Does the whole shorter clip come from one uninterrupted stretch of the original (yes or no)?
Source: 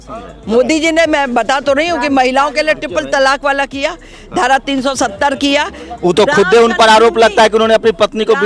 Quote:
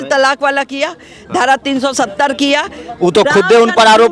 yes